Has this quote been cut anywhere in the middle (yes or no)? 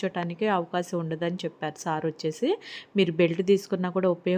no